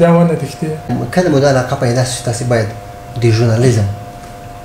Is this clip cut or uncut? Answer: cut